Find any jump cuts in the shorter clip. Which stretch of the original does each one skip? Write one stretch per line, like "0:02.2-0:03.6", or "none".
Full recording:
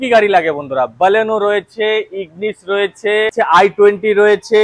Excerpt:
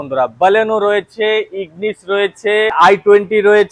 0:03.3-0:03.5

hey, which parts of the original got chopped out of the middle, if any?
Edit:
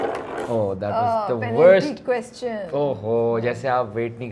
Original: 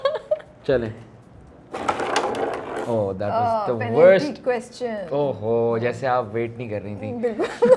none

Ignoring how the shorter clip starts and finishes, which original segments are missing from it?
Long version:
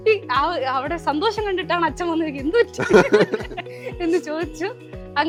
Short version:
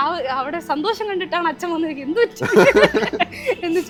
none

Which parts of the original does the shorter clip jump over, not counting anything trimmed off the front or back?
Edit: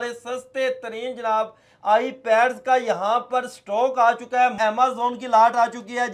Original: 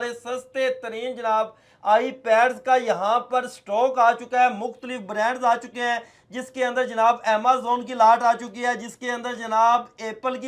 0:04.5-0:07.2

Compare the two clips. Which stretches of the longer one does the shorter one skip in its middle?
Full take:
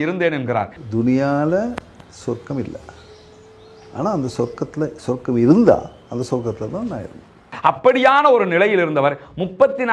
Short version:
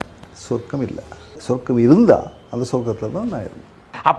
0:03.1-0:05.0

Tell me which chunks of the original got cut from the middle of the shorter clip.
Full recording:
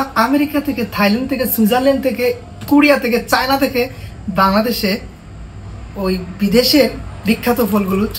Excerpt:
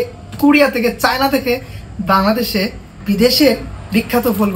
0:05.2-0:06.3

